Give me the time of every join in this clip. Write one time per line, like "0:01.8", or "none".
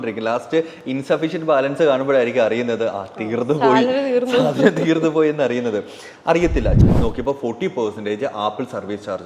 0:06.8